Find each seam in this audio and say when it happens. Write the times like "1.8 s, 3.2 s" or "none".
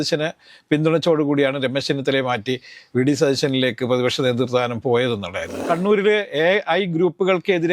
5.6 s